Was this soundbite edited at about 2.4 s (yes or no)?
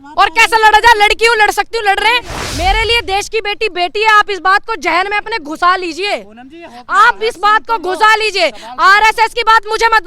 yes